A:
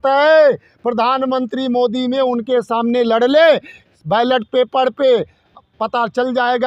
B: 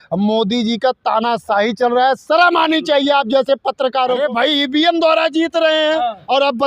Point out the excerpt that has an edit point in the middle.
B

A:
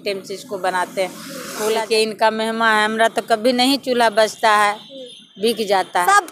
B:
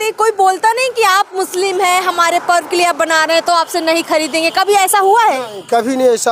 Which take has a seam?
A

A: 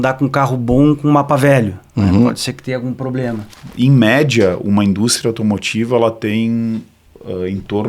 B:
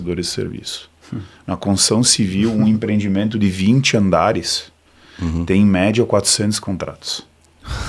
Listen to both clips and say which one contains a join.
A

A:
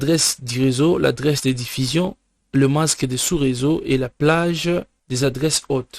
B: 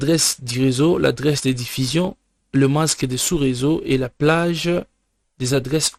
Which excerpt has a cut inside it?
A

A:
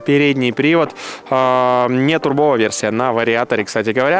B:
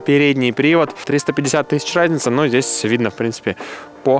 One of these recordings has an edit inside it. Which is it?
B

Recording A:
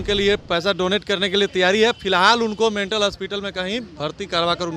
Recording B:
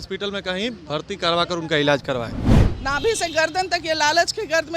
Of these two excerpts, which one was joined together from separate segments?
B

